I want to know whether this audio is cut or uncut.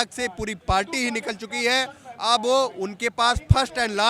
uncut